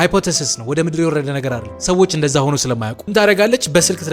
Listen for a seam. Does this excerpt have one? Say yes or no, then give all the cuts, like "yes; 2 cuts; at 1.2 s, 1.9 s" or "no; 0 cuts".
yes; 2 cuts; at 1.7 s, 2.9 s